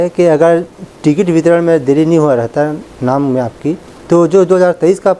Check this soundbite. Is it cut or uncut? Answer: uncut